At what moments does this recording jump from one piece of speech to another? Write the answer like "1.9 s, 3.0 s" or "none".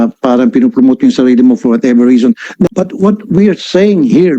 2.7 s